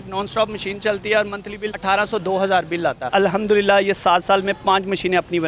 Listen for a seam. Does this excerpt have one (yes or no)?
yes